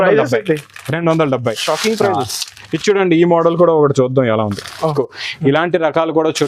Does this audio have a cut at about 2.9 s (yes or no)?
no